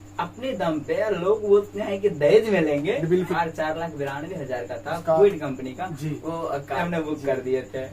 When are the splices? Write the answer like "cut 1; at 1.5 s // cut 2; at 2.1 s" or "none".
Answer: cut 1; at 3.3 s // cut 2; at 6.8 s